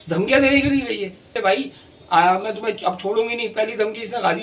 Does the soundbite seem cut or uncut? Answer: cut